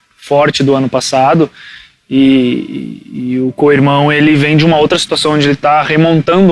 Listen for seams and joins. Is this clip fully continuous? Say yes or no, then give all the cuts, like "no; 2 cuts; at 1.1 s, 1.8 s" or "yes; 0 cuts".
yes; 0 cuts